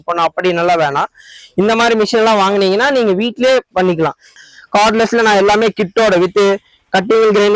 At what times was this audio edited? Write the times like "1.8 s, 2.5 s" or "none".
4.3 s